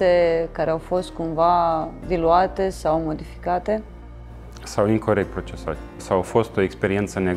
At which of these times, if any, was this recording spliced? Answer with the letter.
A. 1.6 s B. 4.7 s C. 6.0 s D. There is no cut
C